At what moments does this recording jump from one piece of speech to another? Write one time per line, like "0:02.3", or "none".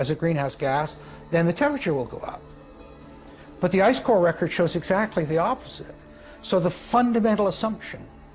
none